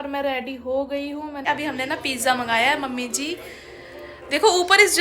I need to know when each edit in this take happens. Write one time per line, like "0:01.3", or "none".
0:01.4